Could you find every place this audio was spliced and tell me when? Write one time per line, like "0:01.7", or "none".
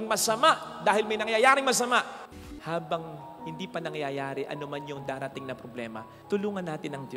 0:02.3